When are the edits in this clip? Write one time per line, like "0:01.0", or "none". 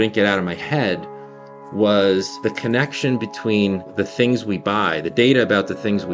0:02.3
0:03.9